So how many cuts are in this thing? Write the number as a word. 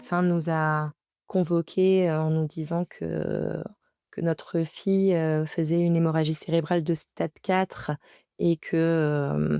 one